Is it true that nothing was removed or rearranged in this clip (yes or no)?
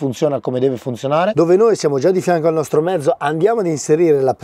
no